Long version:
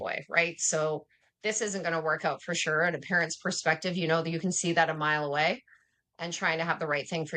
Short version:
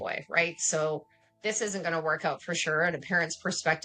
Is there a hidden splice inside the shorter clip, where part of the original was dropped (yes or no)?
no